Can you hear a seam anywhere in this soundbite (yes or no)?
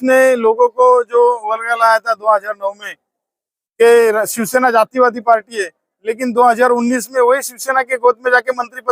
no